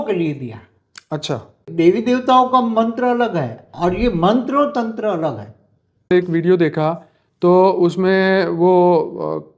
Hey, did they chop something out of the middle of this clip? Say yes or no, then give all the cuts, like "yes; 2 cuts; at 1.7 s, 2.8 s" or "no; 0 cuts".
yes; 2 cuts; at 1.7 s, 6.1 s